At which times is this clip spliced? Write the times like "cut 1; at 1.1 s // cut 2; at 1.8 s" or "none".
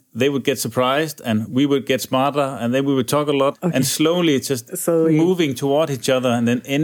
cut 1; at 3.6 s